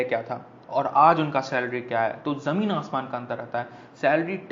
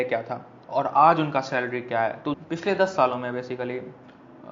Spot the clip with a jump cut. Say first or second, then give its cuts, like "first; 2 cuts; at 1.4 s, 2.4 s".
second; 1 cut; at 2.4 s